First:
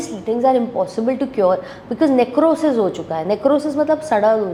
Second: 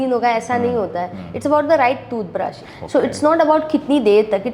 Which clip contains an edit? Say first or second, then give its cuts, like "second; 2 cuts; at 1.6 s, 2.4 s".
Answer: second; 1 cut; at 2.6 s